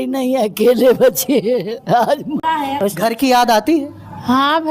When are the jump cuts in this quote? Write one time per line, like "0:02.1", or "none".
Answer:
0:02.4